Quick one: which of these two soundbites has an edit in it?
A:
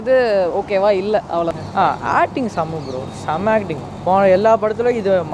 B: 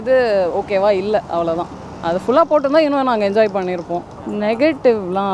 A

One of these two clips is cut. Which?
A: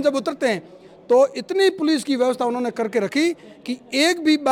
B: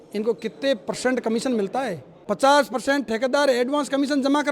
B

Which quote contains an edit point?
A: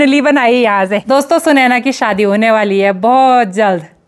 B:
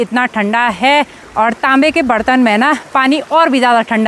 A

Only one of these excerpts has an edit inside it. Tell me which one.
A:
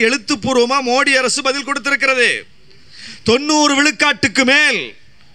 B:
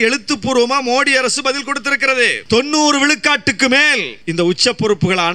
B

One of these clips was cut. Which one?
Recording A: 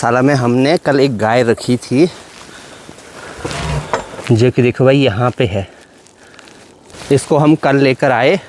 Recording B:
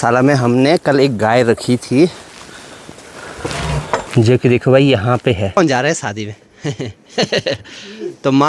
B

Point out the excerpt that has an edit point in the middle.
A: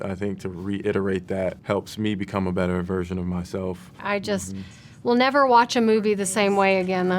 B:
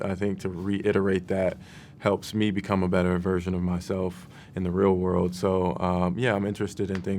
A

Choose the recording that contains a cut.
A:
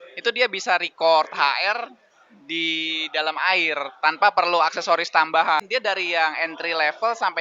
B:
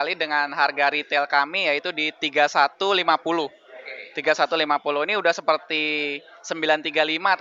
A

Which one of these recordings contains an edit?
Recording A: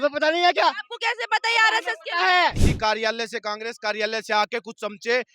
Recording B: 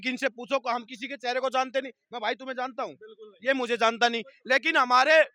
A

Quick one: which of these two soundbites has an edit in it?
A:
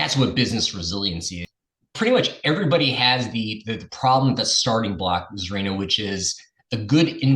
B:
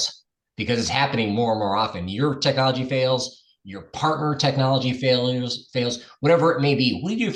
A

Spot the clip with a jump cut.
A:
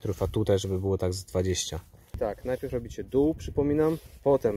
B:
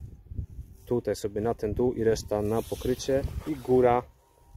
A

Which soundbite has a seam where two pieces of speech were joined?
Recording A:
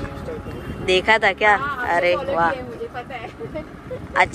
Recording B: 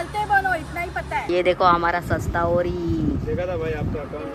B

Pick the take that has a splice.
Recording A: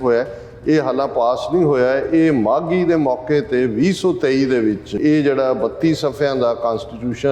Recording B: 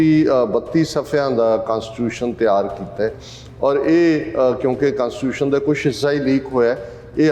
A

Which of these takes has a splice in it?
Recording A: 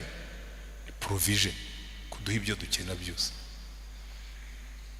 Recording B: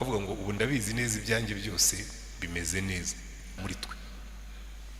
B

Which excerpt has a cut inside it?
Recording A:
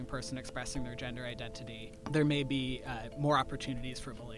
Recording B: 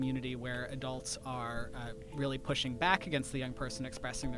A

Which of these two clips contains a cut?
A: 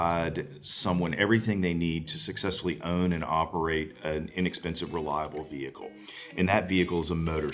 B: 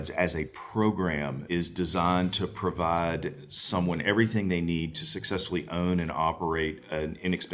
B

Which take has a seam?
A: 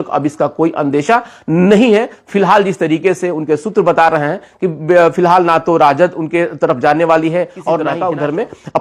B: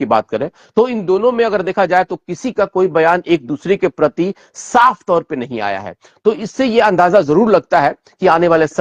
A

